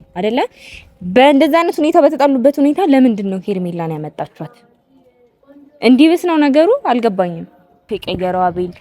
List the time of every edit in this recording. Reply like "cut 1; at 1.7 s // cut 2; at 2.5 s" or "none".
cut 1; at 7.9 s